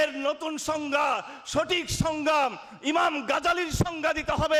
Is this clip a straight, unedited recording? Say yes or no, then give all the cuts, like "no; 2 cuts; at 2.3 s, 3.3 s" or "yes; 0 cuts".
yes; 0 cuts